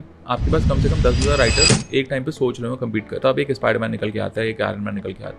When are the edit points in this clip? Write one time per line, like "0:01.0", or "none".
0:03.1